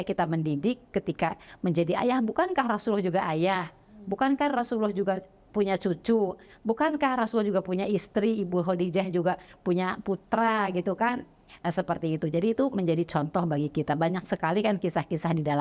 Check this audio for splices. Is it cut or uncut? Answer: uncut